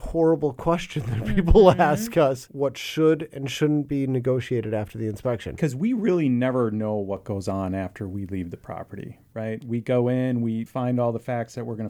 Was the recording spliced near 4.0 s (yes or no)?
no